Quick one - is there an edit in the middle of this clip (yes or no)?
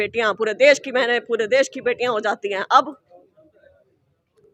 no